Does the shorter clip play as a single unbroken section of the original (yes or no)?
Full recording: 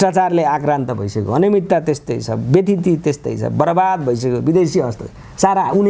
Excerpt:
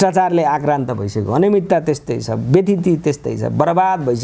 yes